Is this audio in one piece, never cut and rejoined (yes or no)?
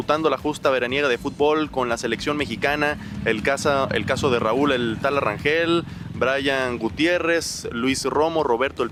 yes